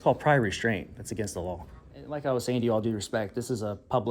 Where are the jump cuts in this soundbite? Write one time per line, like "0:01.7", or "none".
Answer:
0:02.1